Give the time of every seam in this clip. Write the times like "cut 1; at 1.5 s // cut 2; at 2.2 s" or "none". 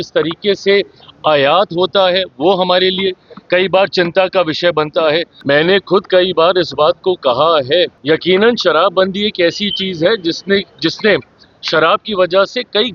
cut 1; at 5.3 s // cut 2; at 8.0 s